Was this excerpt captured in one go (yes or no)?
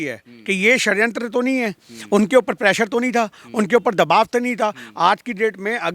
yes